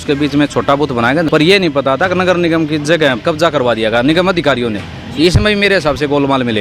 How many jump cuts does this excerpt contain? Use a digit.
2